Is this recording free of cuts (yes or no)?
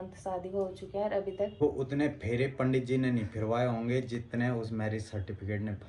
no